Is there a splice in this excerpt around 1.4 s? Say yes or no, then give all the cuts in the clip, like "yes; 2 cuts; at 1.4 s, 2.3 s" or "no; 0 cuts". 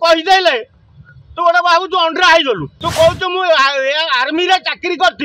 no; 1 cut; at 2.8 s